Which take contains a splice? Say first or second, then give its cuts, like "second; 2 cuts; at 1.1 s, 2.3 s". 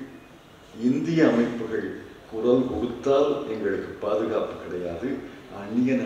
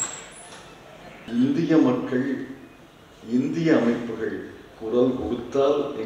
second; 1 cut; at 1.2 s